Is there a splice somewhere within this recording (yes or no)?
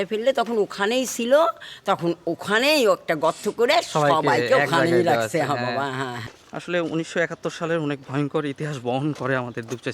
yes